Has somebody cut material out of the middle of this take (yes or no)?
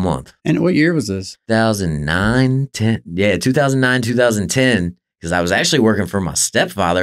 yes